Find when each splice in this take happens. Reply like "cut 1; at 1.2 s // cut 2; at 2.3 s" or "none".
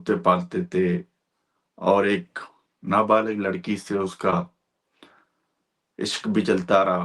none